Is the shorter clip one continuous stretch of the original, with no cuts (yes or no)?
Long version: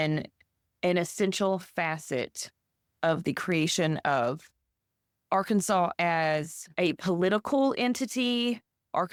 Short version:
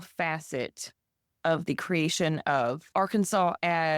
no